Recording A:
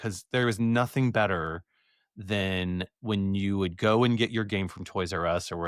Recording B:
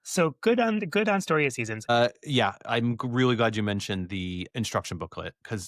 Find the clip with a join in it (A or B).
B